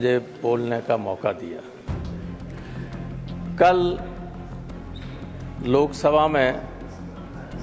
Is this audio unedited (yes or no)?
yes